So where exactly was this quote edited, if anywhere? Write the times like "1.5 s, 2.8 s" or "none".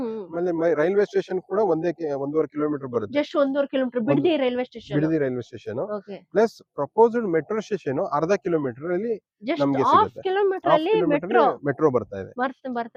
none